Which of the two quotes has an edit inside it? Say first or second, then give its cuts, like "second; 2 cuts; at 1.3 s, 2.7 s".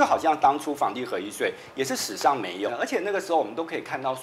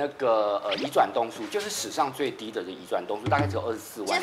first; 1 cut; at 2.7 s